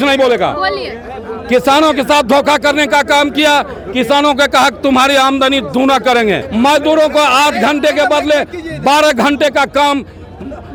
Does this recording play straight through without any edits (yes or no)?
yes